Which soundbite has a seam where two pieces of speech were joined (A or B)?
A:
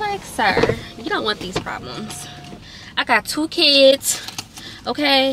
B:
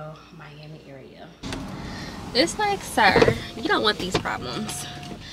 B